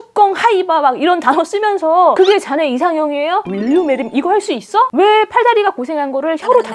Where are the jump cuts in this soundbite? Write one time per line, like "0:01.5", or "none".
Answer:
0:02.1
0:03.5
0:04.9